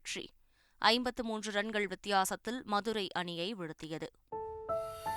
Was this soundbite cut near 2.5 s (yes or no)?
no